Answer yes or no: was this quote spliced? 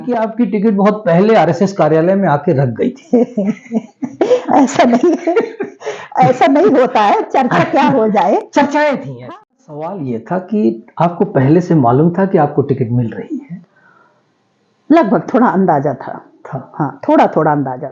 yes